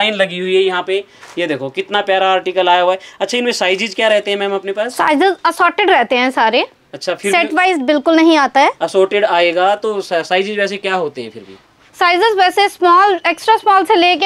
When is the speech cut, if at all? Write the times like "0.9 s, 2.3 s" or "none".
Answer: none